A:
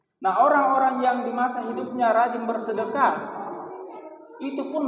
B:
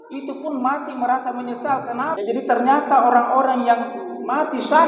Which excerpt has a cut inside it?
B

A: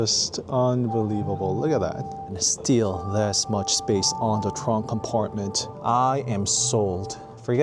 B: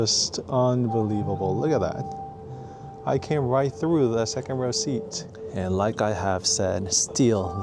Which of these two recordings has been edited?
A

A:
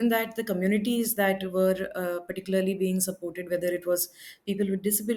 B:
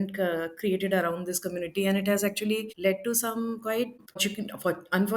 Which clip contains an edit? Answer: B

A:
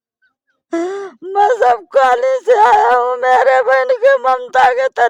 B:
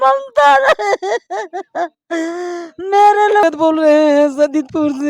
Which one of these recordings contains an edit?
B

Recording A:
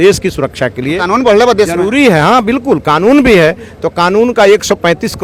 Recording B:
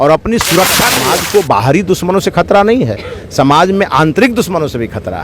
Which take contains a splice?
B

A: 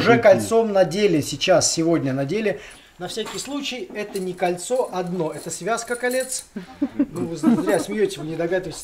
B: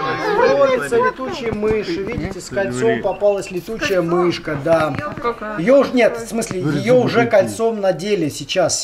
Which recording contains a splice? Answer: A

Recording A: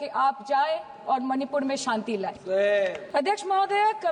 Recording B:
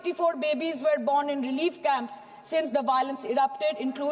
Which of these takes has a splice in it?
A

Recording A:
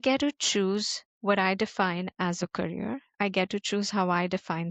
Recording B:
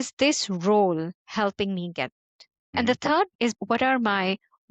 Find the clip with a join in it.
B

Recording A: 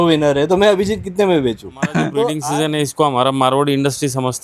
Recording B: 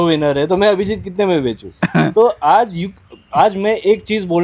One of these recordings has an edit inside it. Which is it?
A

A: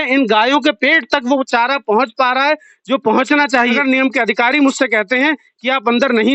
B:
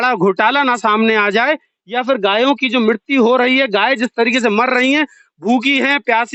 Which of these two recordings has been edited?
A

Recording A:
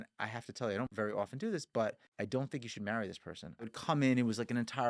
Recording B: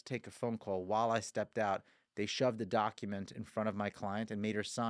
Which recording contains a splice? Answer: A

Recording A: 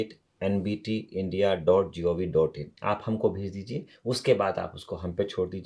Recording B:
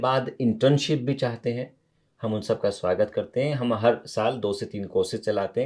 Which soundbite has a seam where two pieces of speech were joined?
A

